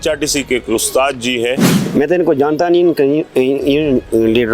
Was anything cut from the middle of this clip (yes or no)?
yes